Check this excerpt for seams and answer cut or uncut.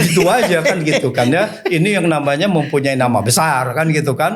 uncut